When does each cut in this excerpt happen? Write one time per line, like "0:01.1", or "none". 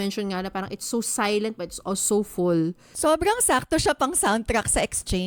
0:03.0

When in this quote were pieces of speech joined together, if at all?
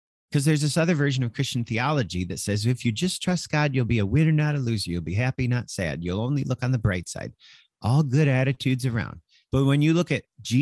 0:09.3

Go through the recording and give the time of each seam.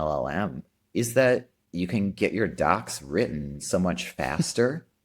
0:01.6

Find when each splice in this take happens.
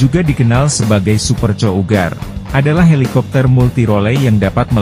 none

